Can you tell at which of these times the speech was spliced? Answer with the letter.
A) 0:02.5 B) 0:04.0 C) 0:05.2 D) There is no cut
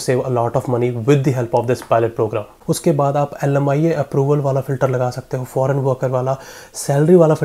A